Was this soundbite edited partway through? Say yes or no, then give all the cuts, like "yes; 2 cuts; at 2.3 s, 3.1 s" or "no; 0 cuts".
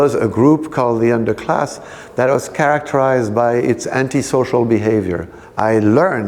yes; 1 cut; at 5.4 s